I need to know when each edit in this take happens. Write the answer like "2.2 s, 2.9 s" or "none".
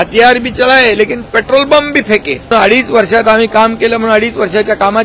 2.5 s